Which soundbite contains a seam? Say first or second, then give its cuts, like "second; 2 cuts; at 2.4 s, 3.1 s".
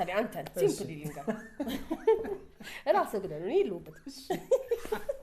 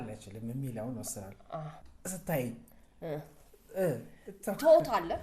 second; 1 cut; at 1.9 s